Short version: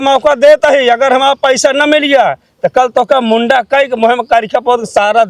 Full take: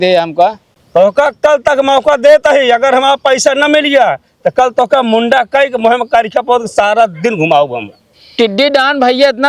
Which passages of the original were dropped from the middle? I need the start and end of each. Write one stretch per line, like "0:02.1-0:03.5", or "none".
none